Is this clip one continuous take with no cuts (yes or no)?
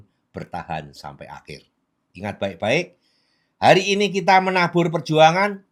yes